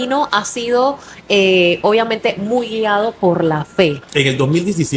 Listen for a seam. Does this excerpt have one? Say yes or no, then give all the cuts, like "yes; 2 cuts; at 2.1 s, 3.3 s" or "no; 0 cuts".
yes; 1 cut; at 4.0 s